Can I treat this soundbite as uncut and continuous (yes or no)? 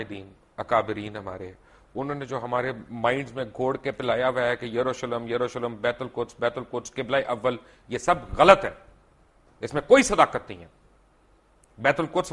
yes